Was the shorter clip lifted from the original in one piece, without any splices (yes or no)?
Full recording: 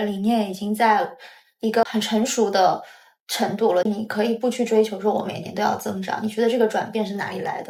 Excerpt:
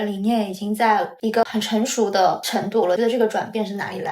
no